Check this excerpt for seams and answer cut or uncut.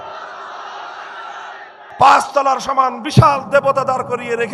cut